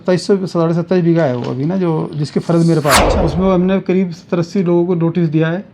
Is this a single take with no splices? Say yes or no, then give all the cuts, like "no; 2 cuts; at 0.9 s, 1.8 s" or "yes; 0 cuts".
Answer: no; 1 cut; at 3.0 s